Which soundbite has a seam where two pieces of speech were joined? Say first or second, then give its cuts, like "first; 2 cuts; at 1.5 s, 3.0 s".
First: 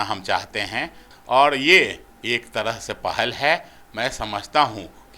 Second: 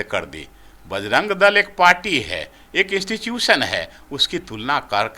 first; 2 cuts; at 1.1 s, 2.1 s